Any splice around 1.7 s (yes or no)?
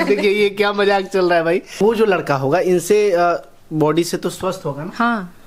yes